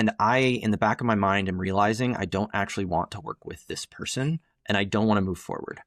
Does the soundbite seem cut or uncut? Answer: uncut